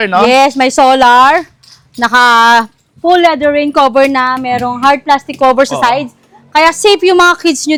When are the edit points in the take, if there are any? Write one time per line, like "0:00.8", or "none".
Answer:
none